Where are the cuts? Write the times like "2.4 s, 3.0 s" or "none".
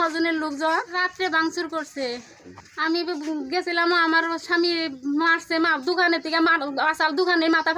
0.9 s